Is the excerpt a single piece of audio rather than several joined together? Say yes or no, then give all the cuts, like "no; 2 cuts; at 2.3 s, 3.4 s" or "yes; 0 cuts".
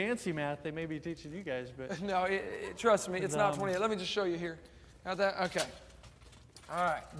no; 1 cut; at 4.5 s